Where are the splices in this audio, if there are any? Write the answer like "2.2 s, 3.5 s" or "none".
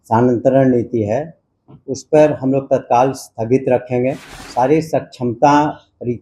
4.3 s